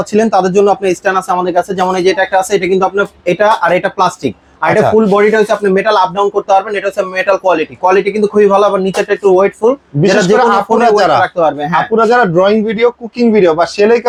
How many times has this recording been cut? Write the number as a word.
zero